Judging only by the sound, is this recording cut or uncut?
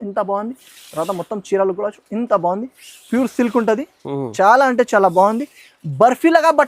uncut